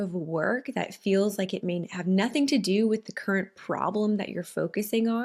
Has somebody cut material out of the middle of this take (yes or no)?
no